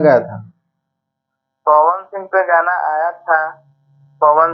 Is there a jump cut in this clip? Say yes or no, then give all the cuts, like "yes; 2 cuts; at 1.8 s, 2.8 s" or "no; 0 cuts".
no; 0 cuts